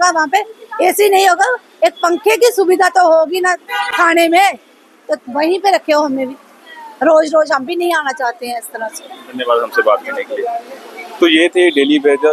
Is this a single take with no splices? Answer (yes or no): yes